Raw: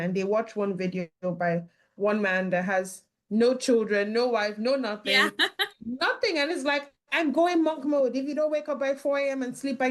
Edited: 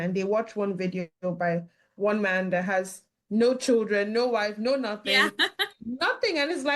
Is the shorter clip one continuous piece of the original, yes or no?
yes